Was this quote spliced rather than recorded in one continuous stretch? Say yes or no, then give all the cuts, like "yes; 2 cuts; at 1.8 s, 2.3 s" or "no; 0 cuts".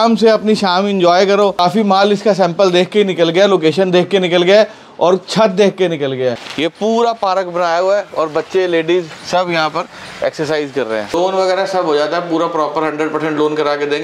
yes; 3 cuts; at 1.6 s, 6.4 s, 11.1 s